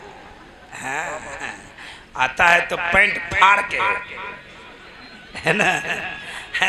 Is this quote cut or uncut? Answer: uncut